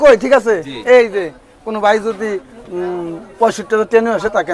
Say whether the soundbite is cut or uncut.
uncut